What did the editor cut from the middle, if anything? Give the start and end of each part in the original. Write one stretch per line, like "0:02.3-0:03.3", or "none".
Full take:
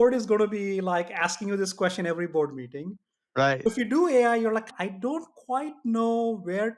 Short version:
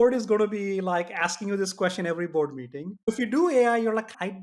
0:03.0-0:03.6